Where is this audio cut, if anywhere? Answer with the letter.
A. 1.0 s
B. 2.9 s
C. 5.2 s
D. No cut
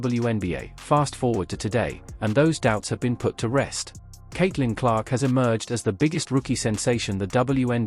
C